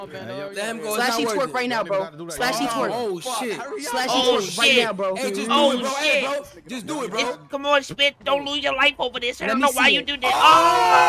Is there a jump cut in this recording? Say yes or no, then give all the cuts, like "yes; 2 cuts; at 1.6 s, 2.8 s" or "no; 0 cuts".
no; 0 cuts